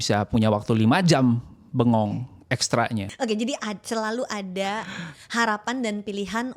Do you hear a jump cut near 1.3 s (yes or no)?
no